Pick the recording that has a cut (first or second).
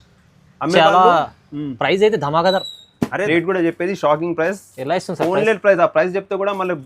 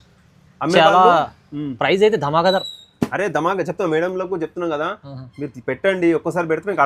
first